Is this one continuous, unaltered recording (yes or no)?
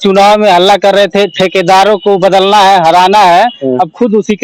yes